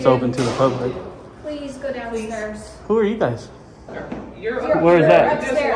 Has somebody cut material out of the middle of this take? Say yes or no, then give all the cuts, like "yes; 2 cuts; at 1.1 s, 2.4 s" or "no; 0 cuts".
yes; 1 cut; at 3.9 s